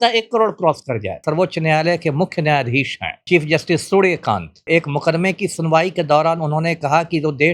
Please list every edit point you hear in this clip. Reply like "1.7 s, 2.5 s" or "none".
1.2 s, 3.2 s, 4.6 s